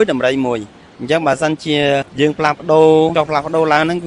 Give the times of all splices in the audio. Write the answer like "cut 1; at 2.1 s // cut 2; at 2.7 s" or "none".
cut 1; at 2.1 s // cut 2; at 3.1 s